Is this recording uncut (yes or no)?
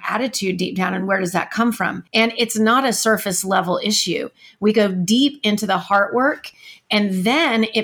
no